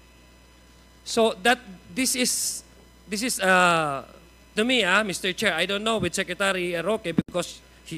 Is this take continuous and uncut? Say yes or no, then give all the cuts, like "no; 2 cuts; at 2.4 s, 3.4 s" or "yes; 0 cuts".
yes; 0 cuts